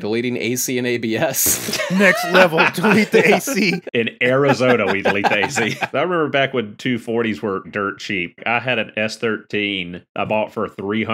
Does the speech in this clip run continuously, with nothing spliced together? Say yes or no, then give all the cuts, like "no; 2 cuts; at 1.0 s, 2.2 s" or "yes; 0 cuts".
no; 4 cuts; at 1.9 s, 3.8 s, 5.9 s, 7.6 s